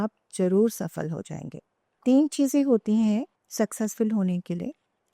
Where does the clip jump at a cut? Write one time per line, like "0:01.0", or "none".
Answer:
0:02.0
0:03.4